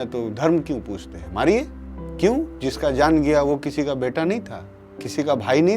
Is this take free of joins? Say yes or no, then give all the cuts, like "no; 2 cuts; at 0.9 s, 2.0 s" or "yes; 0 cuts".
yes; 0 cuts